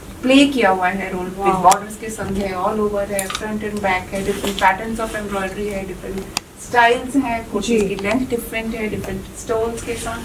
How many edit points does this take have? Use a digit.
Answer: 0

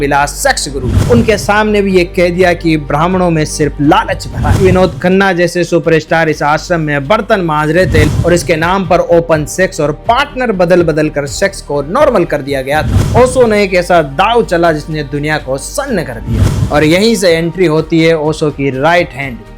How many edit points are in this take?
5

